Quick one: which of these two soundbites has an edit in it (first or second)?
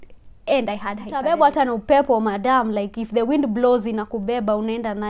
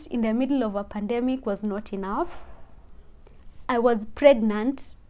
first